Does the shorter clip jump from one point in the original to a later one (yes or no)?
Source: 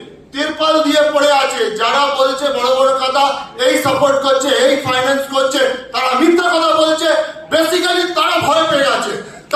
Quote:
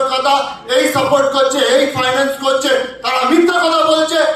no